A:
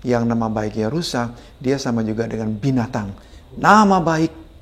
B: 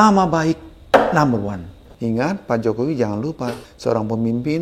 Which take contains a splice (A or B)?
B